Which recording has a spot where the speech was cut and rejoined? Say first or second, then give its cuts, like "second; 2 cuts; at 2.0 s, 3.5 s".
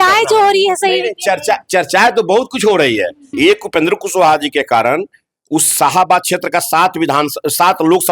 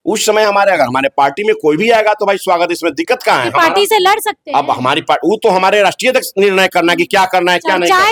first; 1 cut; at 3.2 s